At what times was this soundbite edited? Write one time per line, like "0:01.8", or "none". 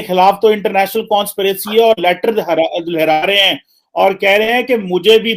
none